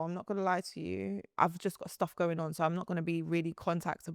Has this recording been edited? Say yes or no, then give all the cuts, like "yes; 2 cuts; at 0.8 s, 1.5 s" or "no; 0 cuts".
yes; 1 cut; at 1.4 s